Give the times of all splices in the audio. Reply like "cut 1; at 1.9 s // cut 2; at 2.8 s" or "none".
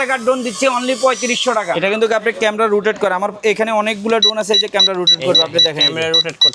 cut 1; at 1.7 s